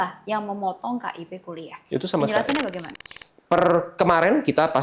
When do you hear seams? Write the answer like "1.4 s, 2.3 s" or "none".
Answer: 2.8 s